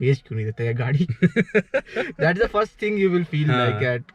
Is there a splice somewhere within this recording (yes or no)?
no